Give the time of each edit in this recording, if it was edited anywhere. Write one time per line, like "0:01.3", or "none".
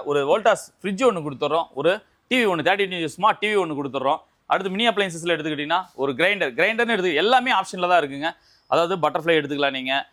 none